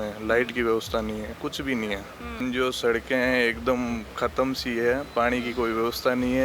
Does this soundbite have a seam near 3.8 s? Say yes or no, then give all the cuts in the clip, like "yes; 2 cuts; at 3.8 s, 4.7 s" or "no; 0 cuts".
no; 1 cut; at 2.4 s